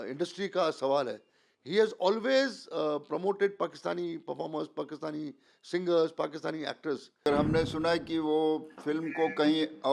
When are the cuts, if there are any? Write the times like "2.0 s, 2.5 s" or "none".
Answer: 7.3 s

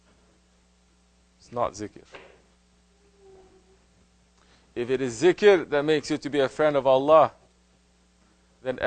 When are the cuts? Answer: 7.0 s

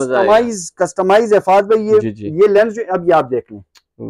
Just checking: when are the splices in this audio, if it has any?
none

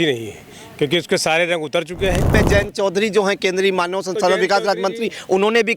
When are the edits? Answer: 2.3 s

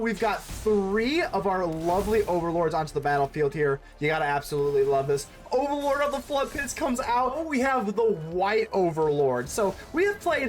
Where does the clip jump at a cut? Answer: 7.4 s

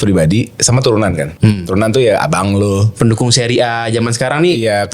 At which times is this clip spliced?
1.3 s

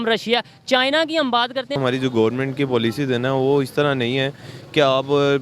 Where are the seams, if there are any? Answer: 1.8 s

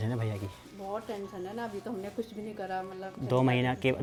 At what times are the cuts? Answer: none

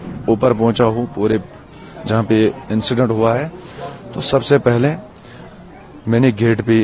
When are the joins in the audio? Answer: none

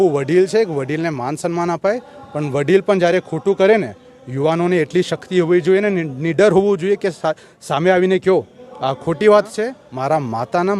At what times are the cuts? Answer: 9.8 s

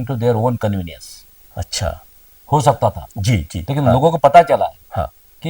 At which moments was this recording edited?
none

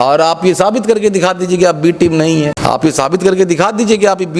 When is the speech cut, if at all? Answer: 2.6 s

